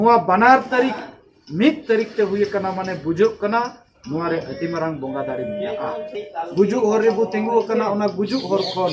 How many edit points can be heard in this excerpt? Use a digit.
1